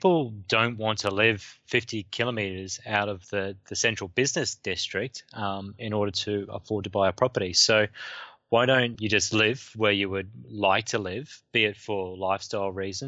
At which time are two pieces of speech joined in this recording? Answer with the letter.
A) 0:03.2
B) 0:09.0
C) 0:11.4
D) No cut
B